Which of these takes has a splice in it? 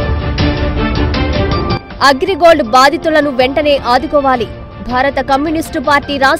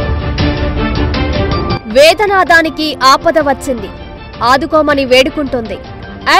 first; 1 cut; at 1.6 s

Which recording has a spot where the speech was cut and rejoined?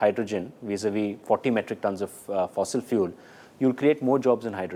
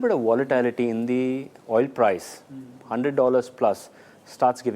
second; 1 cut; at 0.9 s

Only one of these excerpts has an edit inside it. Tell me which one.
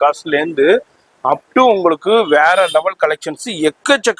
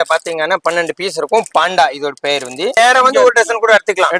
second; 1 cut; at 2.8 s

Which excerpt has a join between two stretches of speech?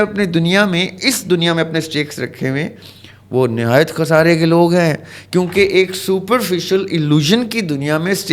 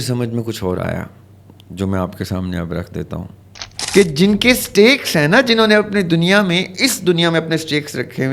second; 1 cut; at 3.7 s

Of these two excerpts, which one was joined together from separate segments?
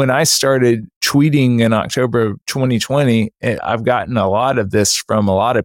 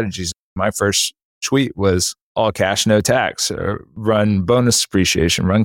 first; 1 cut; at 0.9 s

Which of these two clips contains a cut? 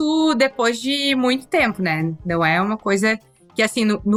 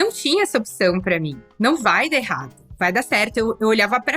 second; 1 cut; at 1.5 s

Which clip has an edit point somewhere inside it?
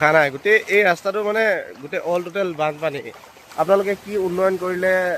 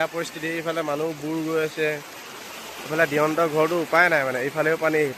first; 1 cut; at 3.4 s

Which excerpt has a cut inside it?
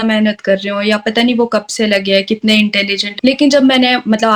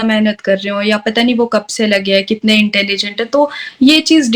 first; 1 cut; at 3.0 s

